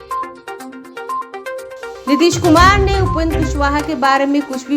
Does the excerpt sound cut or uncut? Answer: cut